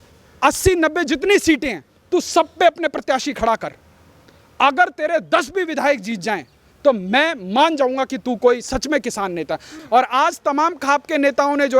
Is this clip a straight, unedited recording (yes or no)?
no